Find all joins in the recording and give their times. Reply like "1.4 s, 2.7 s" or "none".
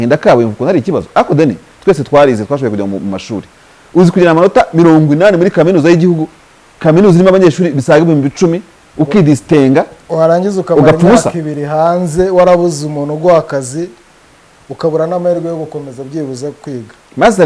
none